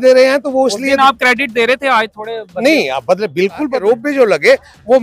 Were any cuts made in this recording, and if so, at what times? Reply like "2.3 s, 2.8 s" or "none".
4.1 s